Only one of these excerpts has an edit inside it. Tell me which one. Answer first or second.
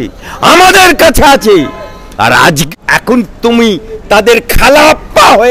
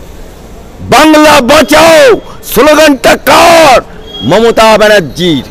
first